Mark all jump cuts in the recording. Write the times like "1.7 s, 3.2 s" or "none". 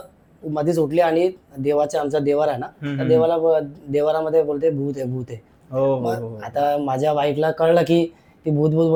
none